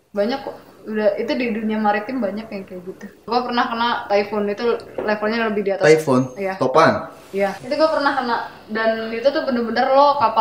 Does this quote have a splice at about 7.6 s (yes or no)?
yes